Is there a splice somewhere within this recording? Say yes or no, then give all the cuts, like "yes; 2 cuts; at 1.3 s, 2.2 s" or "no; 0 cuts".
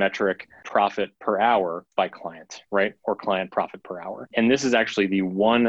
yes; 3 cuts; at 1.0 s, 1.8 s, 4.3 s